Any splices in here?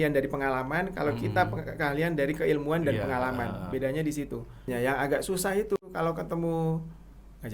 yes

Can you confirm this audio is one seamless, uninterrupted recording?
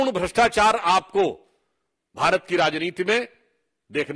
yes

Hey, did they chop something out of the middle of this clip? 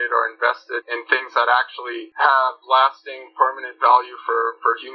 no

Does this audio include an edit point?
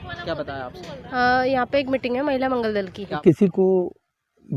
yes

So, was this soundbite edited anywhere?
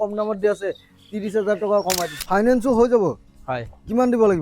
yes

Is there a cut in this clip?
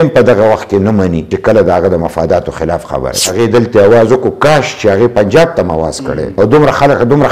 yes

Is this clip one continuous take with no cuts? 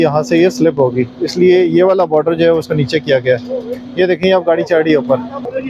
yes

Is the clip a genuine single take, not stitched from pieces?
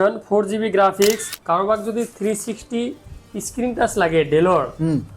no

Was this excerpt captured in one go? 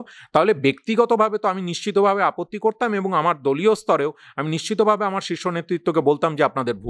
yes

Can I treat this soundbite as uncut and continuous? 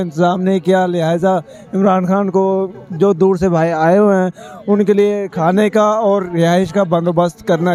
yes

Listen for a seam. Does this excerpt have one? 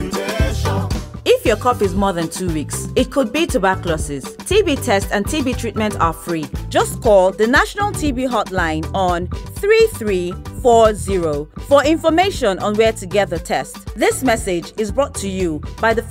yes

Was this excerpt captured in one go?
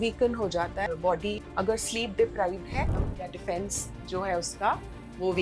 no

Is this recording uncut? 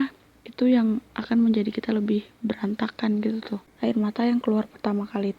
no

